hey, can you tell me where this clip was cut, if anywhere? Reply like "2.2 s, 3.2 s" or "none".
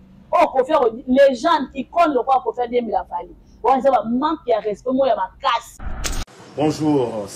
5.8 s